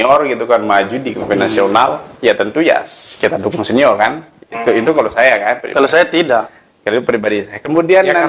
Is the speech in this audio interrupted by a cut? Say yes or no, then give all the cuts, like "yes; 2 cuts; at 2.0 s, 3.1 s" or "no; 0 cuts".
no; 0 cuts